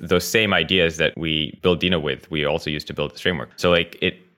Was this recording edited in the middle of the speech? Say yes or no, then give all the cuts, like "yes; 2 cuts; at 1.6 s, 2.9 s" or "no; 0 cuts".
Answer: yes; 2 cuts; at 1.4 s, 3.5 s